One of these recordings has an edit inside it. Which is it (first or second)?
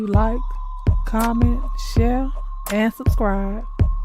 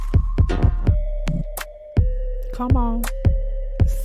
second